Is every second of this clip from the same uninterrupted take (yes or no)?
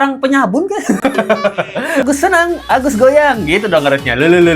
no